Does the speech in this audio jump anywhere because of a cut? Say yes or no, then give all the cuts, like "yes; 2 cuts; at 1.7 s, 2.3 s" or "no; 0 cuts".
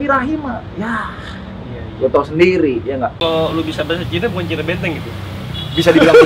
yes; 1 cut; at 3.2 s